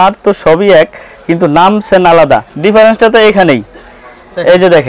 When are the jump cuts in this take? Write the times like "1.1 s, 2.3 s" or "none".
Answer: 2.5 s